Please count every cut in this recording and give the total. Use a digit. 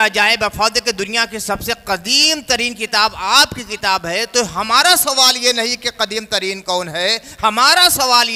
0